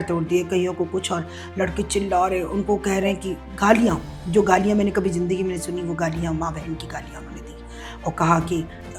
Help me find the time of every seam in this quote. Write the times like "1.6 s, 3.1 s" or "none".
none